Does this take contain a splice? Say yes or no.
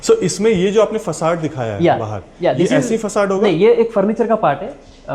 no